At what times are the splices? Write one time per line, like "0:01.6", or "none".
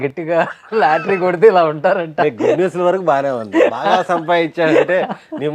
none